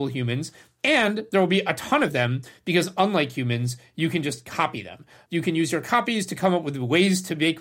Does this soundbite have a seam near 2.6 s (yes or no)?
no